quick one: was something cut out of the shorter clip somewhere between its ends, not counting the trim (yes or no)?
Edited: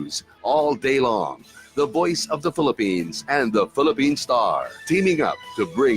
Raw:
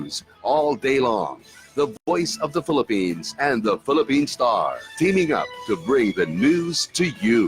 yes